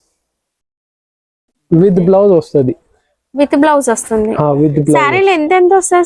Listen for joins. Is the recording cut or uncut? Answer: uncut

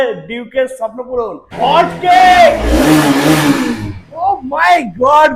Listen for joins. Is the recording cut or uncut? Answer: cut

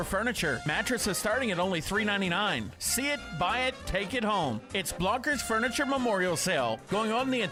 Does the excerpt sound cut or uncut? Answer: uncut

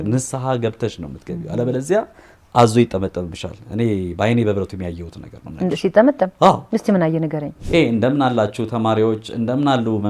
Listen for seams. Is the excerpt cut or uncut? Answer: cut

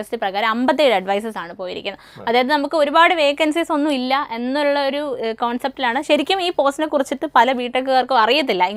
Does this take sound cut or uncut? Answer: uncut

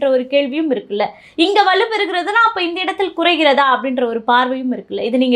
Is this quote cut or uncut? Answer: uncut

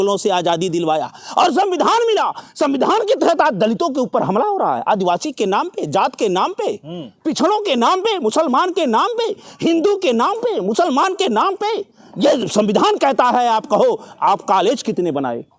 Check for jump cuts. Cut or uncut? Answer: uncut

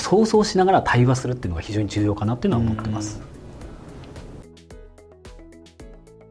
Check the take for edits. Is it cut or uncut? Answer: uncut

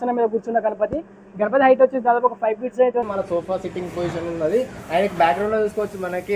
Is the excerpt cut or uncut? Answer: cut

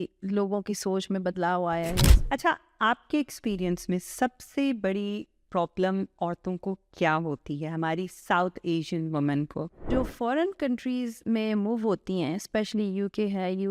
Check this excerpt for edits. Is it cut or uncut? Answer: cut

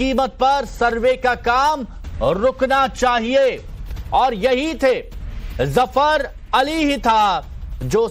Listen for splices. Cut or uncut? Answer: cut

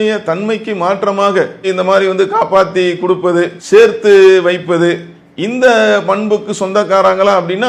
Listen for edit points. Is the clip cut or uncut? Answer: uncut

